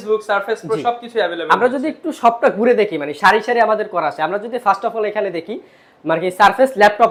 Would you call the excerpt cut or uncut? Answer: uncut